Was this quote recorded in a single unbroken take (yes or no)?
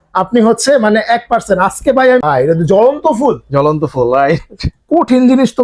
no